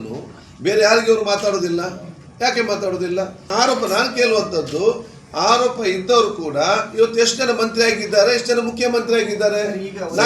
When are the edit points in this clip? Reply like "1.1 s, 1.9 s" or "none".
3.4 s